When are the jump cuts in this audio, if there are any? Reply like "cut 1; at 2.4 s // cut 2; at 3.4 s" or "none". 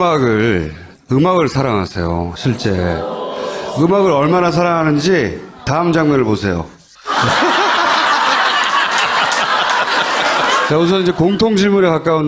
none